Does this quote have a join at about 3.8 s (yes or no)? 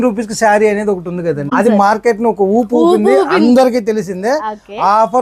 no